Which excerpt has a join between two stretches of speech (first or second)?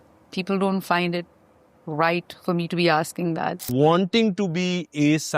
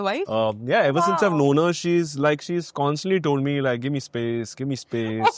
first